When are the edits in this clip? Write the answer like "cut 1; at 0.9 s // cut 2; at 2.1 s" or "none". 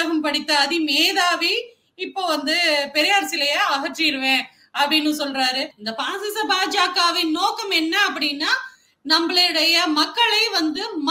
cut 1; at 5.8 s